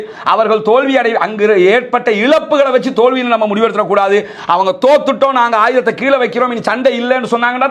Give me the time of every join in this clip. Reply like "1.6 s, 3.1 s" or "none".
none